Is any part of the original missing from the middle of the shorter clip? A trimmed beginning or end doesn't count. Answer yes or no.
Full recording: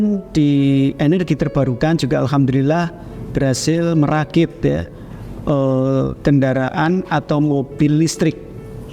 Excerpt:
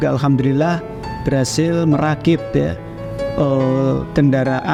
no